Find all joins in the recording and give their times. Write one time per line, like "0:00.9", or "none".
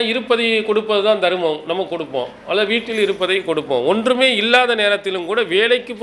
none